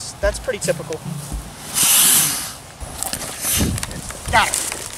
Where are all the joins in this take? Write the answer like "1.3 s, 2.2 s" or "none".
2.9 s